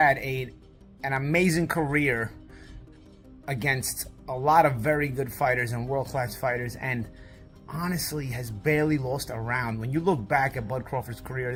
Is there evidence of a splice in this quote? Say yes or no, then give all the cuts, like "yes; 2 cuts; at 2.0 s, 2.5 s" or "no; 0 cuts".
no; 0 cuts